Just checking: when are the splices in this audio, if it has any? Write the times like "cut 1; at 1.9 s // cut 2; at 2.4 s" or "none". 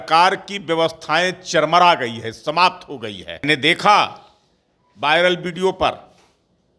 cut 1; at 3.4 s